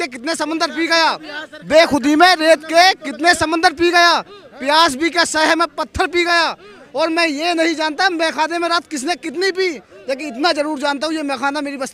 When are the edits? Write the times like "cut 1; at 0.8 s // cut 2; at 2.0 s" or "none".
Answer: none

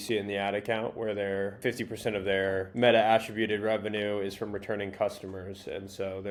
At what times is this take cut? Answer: none

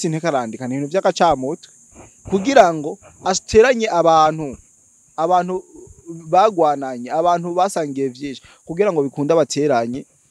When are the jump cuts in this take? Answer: none

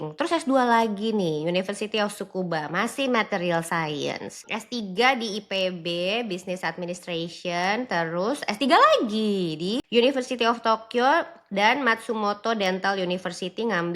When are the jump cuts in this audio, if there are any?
cut 1; at 4.4 s // cut 2; at 9.8 s

